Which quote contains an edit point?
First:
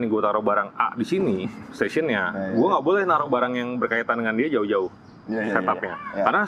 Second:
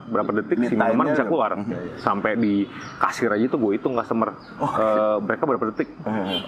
second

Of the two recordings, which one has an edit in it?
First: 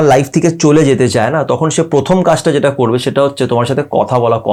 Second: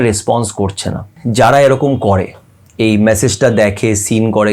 second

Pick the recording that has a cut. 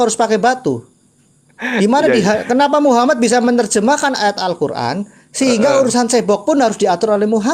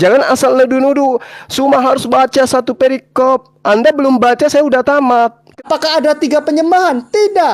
second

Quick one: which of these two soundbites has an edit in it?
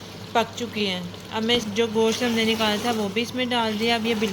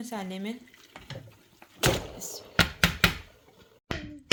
first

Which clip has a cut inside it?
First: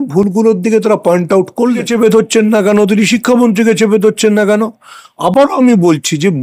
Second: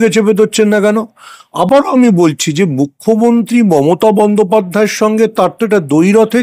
first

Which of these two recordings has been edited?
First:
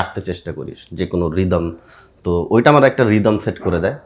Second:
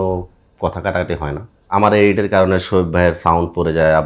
second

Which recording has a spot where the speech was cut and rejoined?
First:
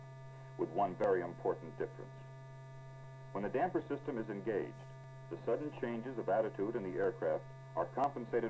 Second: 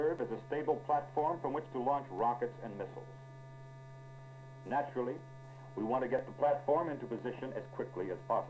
first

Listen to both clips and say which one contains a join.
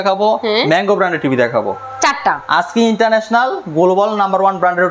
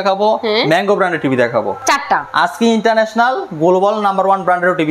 second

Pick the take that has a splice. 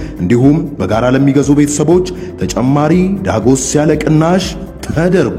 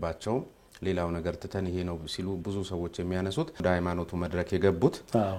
second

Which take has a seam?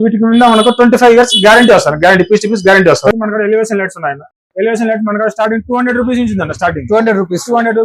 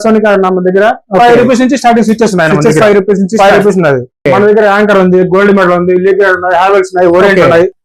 first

